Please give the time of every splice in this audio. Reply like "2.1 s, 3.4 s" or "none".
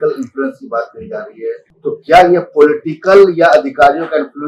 1.7 s